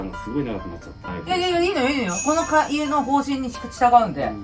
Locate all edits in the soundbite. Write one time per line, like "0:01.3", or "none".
0:01.1